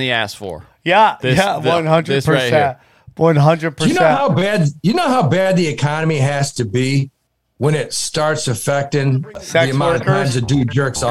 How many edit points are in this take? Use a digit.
1